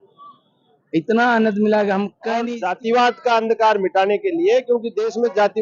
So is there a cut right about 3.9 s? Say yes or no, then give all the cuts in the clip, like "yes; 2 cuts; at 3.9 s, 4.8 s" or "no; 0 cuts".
no; 1 cut; at 2.5 s